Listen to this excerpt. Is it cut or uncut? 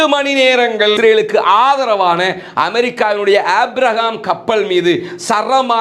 uncut